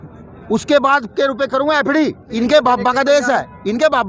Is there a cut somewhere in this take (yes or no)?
yes